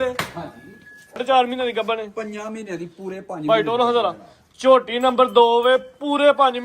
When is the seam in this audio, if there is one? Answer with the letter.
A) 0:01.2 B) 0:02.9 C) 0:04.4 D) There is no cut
A